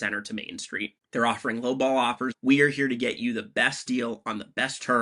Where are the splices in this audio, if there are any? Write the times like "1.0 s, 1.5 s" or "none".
1.0 s, 2.3 s